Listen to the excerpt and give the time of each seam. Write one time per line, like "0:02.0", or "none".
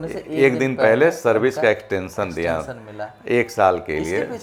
none

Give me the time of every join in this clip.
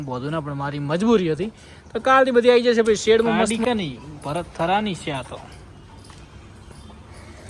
0:03.6

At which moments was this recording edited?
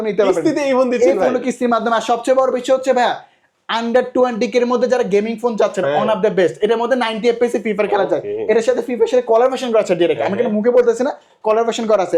none

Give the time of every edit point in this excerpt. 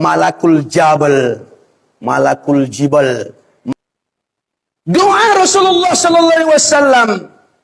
0:03.7

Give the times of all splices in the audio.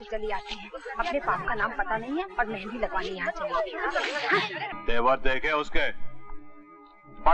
0:04.7

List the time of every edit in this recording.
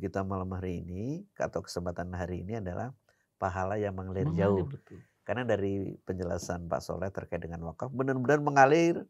none

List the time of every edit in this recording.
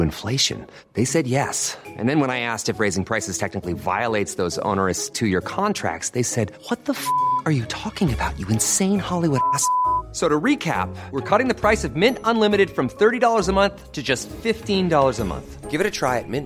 none

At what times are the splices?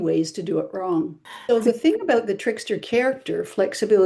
0:01.2

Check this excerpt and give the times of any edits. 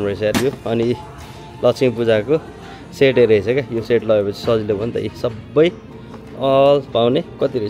none

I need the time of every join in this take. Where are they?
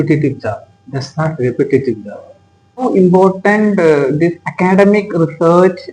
0:02.8

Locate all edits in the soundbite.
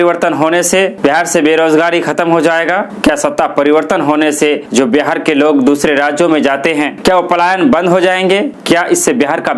0:00.9
0:06.9

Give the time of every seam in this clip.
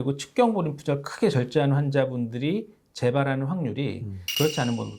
none

